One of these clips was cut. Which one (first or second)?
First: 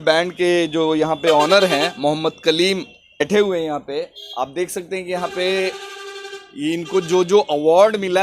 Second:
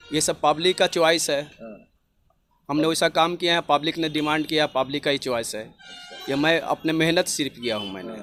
first